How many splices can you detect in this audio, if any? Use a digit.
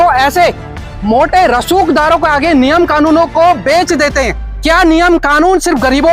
1